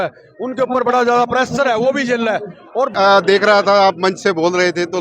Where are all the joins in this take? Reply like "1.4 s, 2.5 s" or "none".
2.9 s